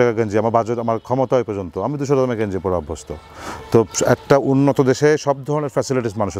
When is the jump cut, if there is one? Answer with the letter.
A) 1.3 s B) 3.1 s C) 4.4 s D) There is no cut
D